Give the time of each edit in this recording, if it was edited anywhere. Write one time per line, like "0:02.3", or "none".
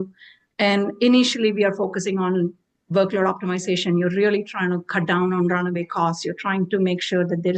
none